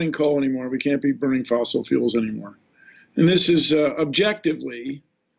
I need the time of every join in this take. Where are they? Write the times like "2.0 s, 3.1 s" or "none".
0.9 s

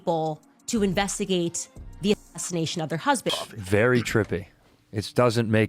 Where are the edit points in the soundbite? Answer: 3.4 s

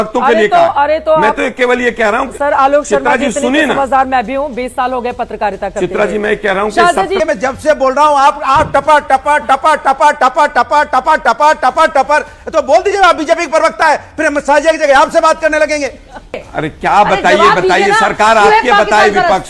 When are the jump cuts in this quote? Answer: 7.2 s, 16.4 s

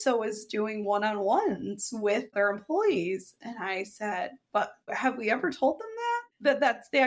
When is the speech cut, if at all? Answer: 2.3 s, 6.2 s

